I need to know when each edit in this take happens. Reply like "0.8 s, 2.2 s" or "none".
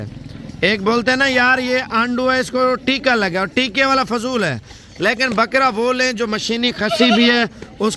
none